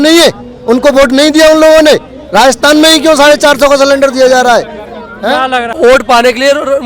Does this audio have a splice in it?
yes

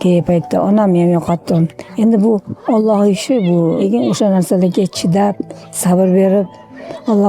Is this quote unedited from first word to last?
no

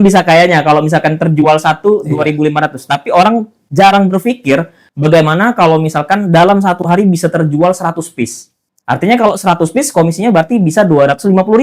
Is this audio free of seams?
yes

